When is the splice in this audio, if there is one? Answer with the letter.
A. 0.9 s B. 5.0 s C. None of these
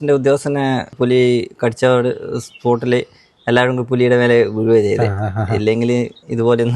A